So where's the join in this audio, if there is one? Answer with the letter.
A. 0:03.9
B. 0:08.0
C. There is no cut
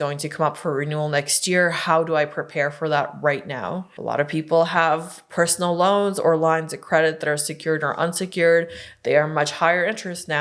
A